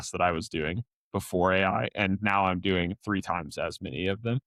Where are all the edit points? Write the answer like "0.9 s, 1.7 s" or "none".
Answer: none

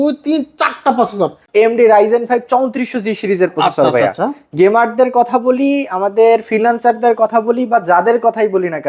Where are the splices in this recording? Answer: 1.4 s

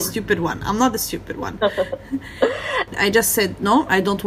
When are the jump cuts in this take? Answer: 3.0 s

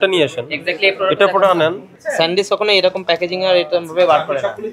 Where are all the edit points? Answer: 2.0 s

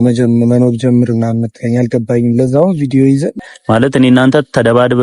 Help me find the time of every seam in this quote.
3.5 s

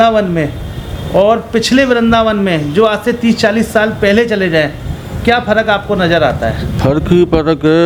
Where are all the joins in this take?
none

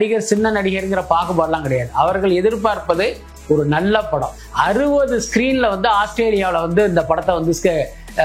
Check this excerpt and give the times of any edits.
4.3 s

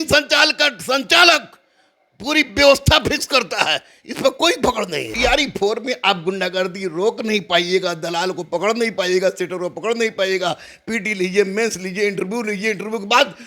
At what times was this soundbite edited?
5.1 s

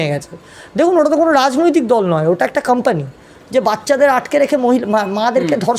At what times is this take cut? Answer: 3.3 s

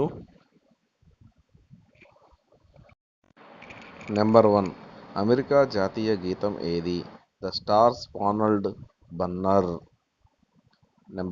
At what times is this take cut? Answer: 3.1 s

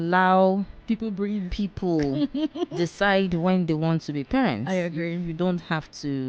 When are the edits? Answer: none

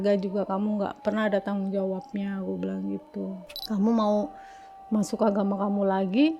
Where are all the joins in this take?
3.6 s

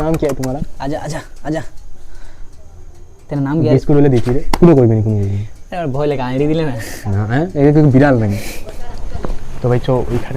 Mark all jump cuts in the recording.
none

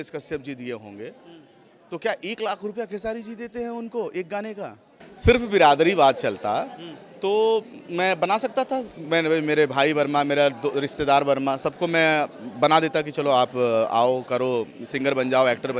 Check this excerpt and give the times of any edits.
5.0 s

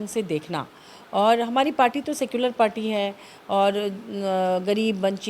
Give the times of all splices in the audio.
none

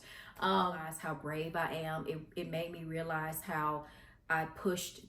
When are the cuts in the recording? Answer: 0.9 s

